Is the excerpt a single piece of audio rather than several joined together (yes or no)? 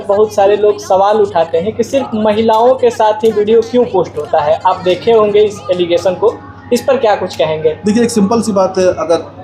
yes